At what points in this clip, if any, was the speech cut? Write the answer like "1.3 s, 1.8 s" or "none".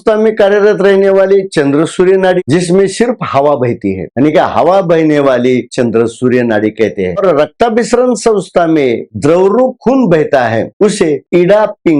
2.4 s, 5.7 s, 7.2 s, 9.1 s